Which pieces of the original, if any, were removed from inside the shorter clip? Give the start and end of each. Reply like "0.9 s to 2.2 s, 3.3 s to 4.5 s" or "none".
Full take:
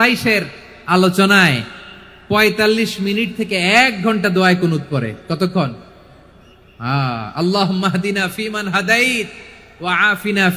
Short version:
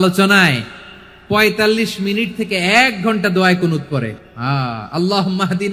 5.2 s to 6.6 s